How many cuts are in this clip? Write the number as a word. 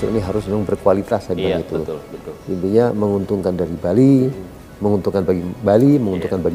zero